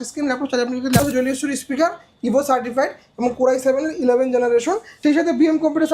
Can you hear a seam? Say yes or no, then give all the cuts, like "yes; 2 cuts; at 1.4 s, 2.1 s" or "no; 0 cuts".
yes; 2 cuts; at 1.0 s, 4.9 s